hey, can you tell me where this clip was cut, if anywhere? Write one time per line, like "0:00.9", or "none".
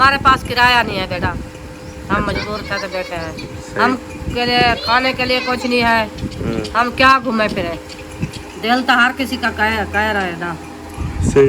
0:01.4
0:03.5
0:06.3